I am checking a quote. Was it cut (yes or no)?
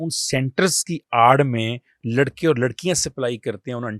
no